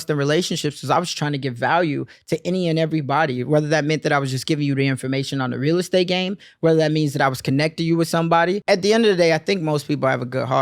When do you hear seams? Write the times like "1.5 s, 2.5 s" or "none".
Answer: 8.6 s